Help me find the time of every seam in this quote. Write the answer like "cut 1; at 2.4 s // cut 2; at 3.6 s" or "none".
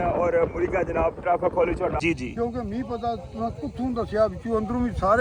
cut 1; at 2.0 s

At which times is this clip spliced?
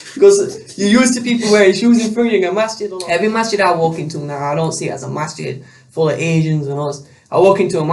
cut 1; at 2.8 s

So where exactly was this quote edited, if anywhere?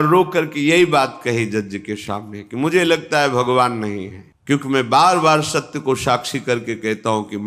none

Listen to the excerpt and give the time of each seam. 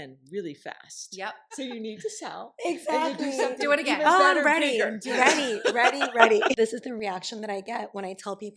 cut 1; at 1.5 s // cut 2; at 6.6 s

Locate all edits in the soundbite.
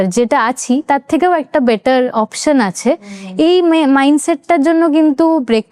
none

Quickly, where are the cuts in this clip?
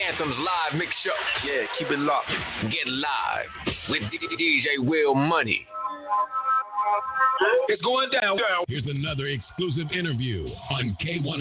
cut 1; at 7.7 s

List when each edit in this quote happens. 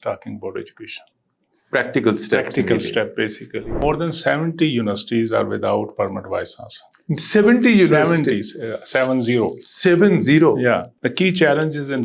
cut 1; at 3.8 s // cut 2; at 11.0 s

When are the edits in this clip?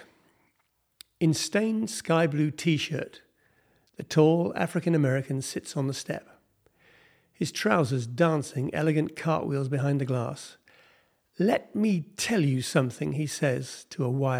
cut 1; at 1.6 s

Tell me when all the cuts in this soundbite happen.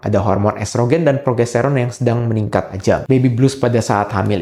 cut 1; at 3.0 s

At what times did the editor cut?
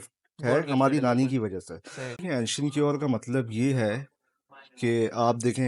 cut 1; at 2.2 s

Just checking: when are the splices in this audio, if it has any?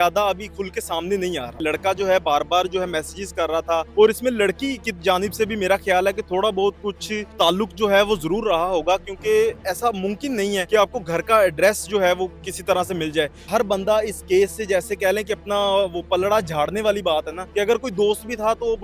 cut 1; at 1.6 s // cut 2; at 3.9 s // cut 3; at 7.3 s // cut 4; at 10.6 s // cut 5; at 12.5 s // cut 6; at 13.5 s // cut 7; at 17.4 s

